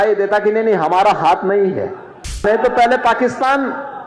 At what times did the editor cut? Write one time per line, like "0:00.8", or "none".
0:02.4